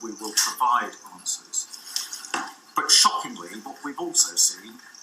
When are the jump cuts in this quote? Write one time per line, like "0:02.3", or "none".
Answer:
0:01.5